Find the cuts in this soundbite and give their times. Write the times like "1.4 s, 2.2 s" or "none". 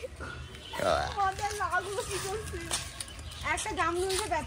none